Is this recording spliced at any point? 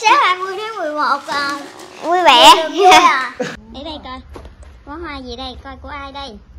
yes; 1 cut; at 3.3 s

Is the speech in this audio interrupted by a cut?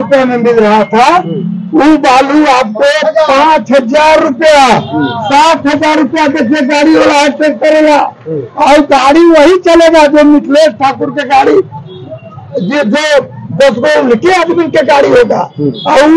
no; 0 cuts

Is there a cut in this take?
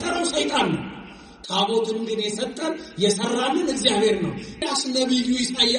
yes; 1 cut; at 4.7 s

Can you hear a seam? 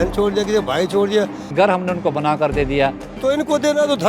yes; 2 cuts; at 1.4 s, 3.1 s

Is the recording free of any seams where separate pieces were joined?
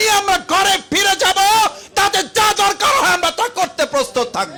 yes; 0 cuts

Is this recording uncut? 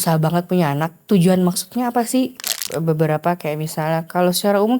no; 1 cut; at 2.6 s

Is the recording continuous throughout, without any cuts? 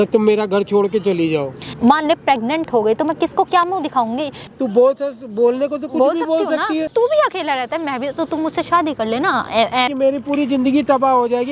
no; 4 cuts; at 1.6 s, 4.4 s, 6.9 s, 9.9 s

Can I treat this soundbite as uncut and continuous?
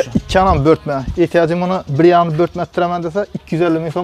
yes; 0 cuts

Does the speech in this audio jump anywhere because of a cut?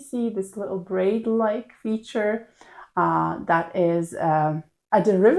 no; 0 cuts

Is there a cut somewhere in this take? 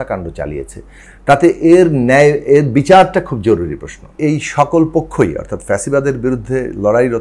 yes; 1 cut; at 4.1 s

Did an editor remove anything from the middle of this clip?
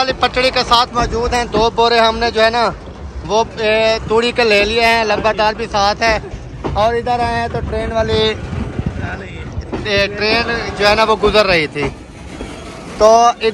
no; 0 cuts

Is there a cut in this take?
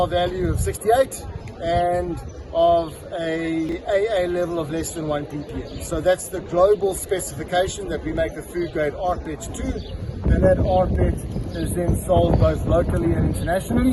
yes; 1 cut; at 3.7 s

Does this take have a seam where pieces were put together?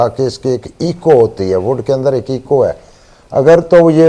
no; 0 cuts

